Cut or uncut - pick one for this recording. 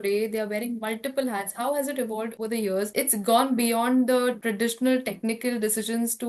uncut